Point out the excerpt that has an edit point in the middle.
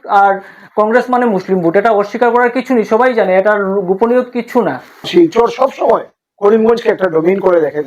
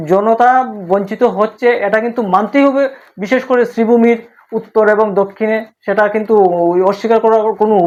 first; 1 cut; at 5.1 s

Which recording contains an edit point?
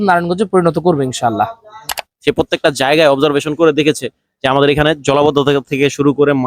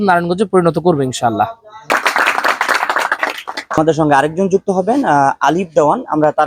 first; 1 cut; at 1.8 s

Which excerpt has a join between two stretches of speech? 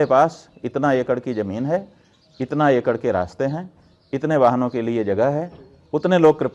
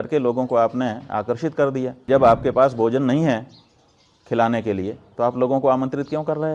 second; 1 cut; at 2.0 s

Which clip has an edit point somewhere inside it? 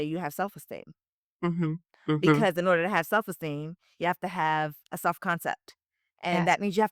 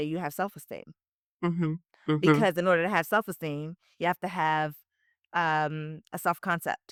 first; 1 cut; at 4.8 s

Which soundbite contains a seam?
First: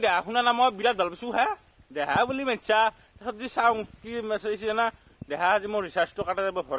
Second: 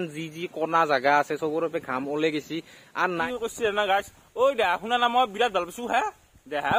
second; 1 cut; at 3.2 s

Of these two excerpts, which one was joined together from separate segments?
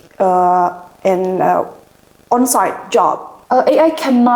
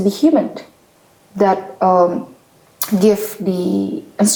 first; 1 cut; at 3.3 s

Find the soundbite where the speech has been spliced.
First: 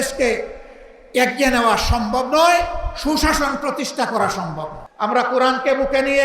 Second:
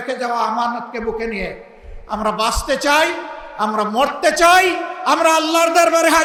first; 1 cut; at 4.8 s

